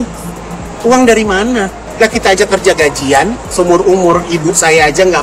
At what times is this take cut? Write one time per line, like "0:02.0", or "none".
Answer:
0:01.8
0:03.4